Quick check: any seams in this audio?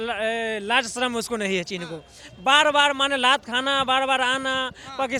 no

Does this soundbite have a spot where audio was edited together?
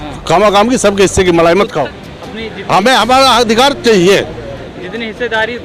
yes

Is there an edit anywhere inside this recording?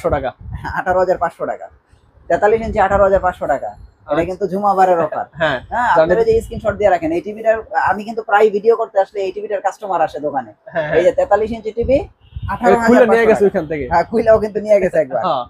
no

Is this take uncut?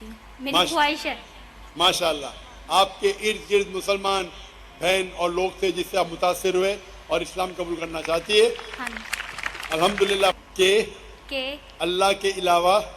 no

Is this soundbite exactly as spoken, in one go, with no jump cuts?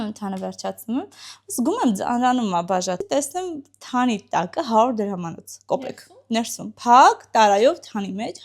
no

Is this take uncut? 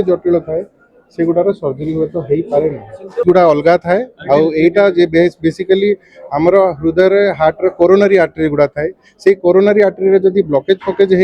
no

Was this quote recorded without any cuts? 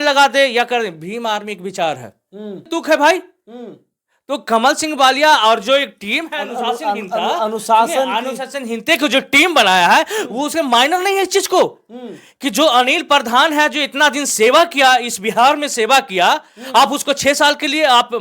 no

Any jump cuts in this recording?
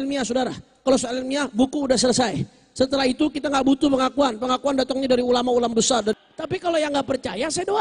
yes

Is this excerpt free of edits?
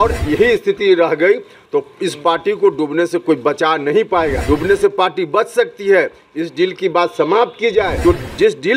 no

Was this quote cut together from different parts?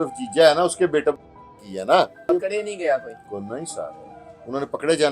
yes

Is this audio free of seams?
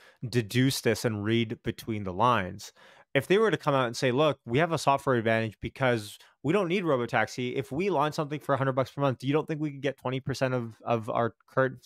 yes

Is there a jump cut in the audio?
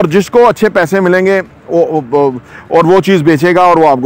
no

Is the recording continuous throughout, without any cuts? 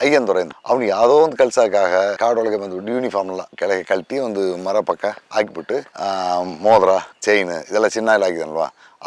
yes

